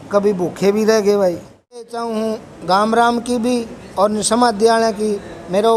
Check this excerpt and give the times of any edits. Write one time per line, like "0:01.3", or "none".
0:02.1

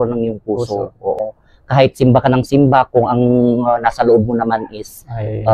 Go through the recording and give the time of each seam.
0:01.2

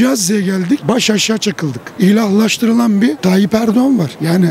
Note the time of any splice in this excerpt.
0:01.9

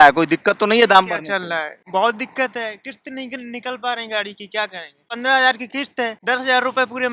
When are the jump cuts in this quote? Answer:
0:01.8
0:05.1
0:06.2

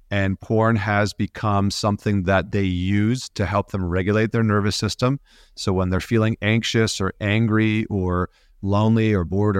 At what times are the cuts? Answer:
none

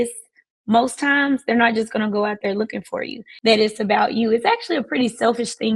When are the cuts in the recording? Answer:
0:03.3

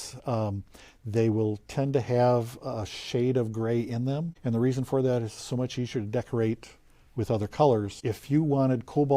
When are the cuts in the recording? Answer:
0:04.3
0:07.9

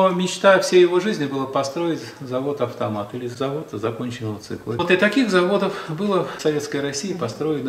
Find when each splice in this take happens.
0:03.3
0:04.8
0:06.4

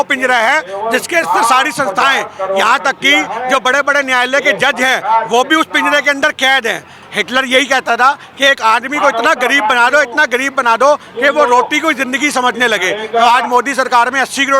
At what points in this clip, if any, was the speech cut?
0:07.0

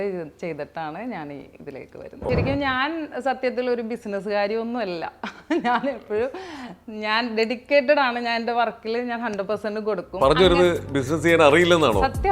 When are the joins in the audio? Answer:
0:02.3

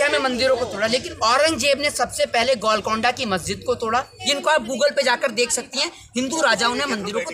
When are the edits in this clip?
0:01.1
0:04.2

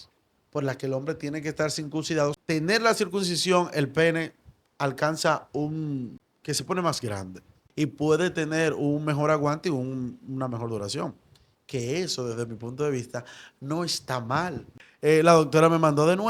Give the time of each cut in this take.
0:02.4
0:06.3
0:07.6
0:14.8

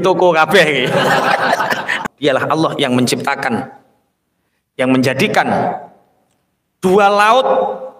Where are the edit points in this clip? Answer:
0:02.0

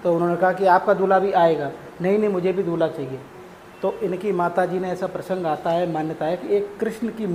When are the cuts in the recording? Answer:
none

